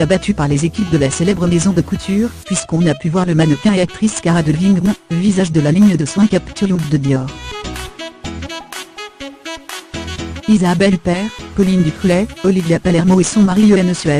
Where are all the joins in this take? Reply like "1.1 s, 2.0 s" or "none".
7.4 s, 10.4 s